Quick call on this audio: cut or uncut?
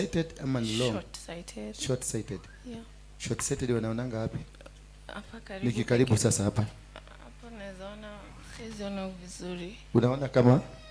uncut